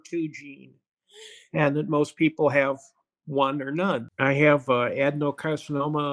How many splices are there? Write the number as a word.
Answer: one